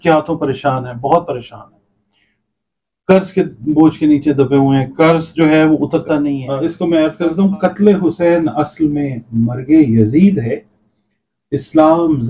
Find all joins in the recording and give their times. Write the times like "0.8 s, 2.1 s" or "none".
6.5 s